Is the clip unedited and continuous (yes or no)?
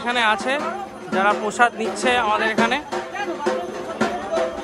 yes